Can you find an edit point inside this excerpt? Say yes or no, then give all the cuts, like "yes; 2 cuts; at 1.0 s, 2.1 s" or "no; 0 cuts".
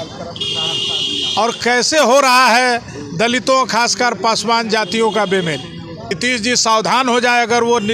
yes; 1 cut; at 6.1 s